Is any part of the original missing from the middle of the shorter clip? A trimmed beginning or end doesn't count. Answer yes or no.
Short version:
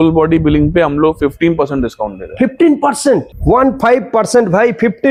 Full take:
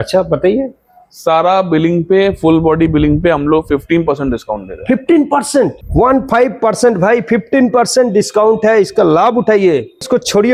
no